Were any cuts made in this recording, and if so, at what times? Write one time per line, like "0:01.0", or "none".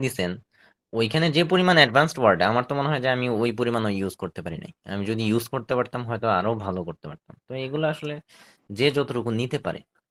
none